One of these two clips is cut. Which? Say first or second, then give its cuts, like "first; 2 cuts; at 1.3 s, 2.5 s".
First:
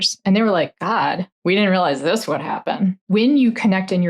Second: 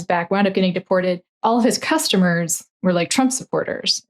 first; 2 cuts; at 1.3 s, 3.0 s